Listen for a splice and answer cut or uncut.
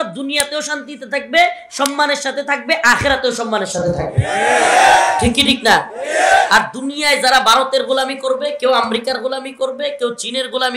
uncut